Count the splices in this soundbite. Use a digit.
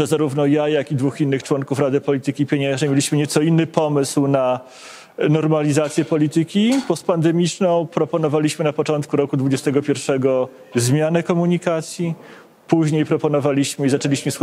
0